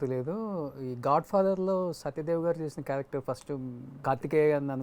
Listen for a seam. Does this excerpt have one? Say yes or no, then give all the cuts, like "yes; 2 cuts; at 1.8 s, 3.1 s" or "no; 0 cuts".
yes; 1 cut; at 3.9 s